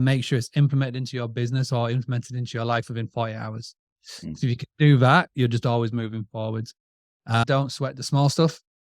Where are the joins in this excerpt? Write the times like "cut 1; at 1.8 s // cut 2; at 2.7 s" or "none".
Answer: cut 1; at 7.5 s